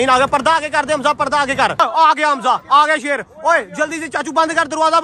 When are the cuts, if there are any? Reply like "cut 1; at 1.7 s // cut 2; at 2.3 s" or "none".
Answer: cut 1; at 1.8 s